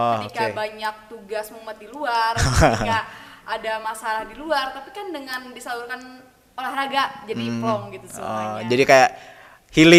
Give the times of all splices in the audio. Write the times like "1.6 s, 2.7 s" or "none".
none